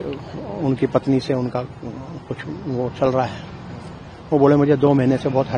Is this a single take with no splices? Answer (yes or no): yes